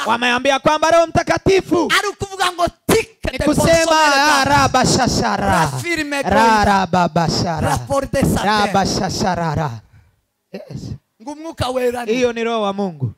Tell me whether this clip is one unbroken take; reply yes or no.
yes